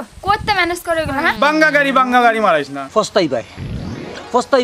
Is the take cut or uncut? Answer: cut